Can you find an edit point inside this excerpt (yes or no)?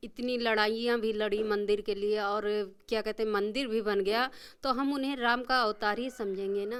no